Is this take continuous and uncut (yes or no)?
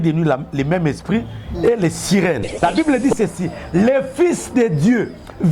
no